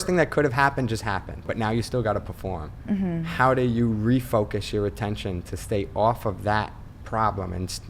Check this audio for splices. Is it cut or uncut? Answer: cut